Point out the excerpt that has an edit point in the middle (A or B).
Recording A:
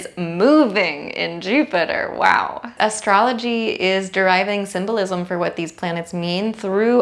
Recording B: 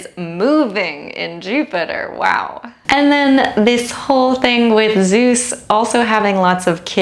A